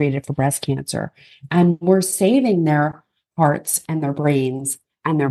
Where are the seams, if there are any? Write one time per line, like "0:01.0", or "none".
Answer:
none